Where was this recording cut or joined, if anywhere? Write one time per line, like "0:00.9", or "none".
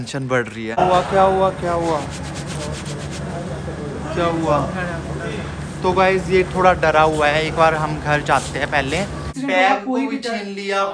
0:00.8
0:09.3